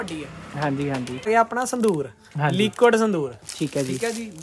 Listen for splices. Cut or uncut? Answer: cut